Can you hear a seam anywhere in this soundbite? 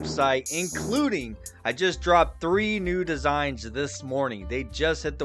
no; 0 cuts

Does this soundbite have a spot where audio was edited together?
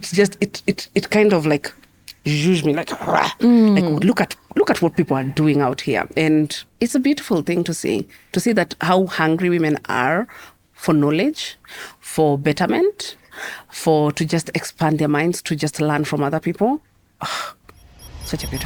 no; 0 cuts

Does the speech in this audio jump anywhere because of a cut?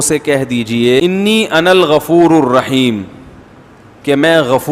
yes; 1 cut; at 1.0 s

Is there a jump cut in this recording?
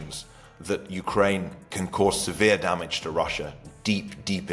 no; 0 cuts

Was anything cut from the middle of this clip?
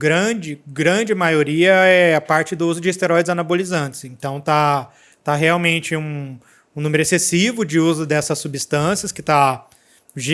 no; 0 cuts

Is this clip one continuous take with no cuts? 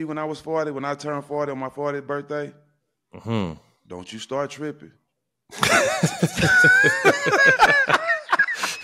yes; 0 cuts

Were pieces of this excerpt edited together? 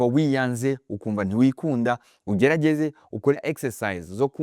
yes; 1 cut; at 3.4 s

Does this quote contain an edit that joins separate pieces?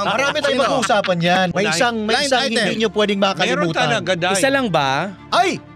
yes; 1 cut; at 1.5 s

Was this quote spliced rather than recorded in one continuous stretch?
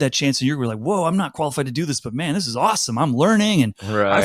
no; 0 cuts

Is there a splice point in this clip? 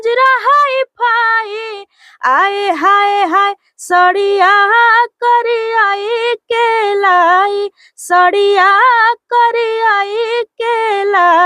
no; 0 cuts

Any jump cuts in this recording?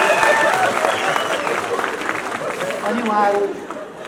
no; 0 cuts

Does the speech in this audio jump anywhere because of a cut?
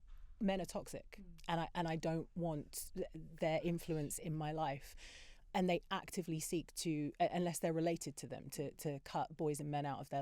no; 0 cuts

